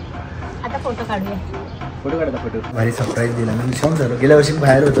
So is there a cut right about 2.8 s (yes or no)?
yes